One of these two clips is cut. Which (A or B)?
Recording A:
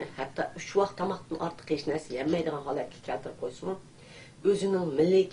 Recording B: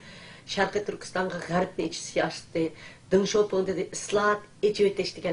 A